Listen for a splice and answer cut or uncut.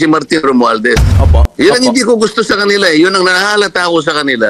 cut